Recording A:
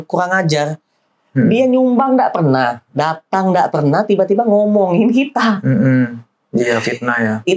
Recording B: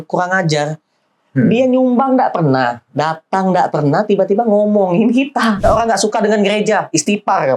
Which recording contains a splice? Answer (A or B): B